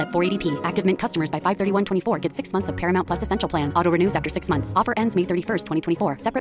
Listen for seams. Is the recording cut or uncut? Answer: uncut